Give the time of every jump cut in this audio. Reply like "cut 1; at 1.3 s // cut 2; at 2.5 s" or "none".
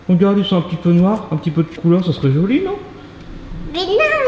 none